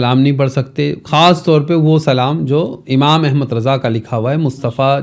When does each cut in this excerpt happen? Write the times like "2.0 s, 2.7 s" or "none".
none

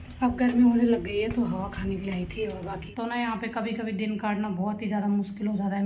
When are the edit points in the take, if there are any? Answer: 2.8 s

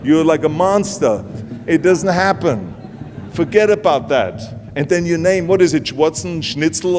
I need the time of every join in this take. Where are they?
1.4 s

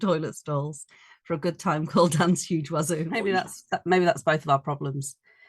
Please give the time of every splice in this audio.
3.1 s

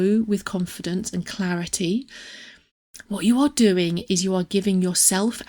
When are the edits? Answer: 2.2 s

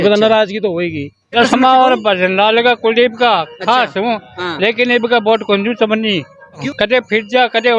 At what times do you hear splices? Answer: 1.2 s, 6.6 s

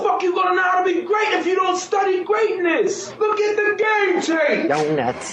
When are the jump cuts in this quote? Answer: 0.9 s

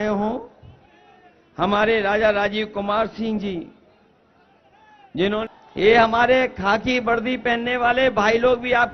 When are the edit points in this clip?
5.4 s

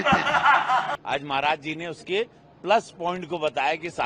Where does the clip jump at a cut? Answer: 1.0 s

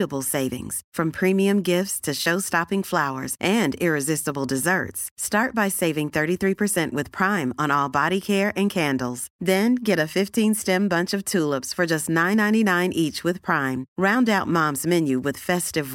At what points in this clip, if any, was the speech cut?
none

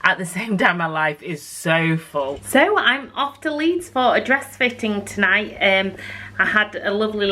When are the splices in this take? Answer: 2.4 s

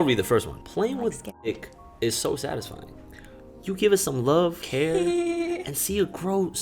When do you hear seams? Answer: 4.6 s

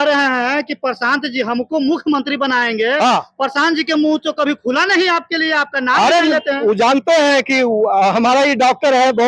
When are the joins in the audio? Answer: none

